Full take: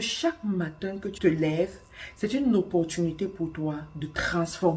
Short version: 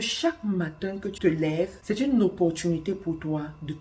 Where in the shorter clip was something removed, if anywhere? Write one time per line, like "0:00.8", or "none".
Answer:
0:01.8